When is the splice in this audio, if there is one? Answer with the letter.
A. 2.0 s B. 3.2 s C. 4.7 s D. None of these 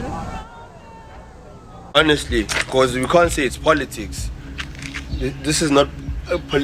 A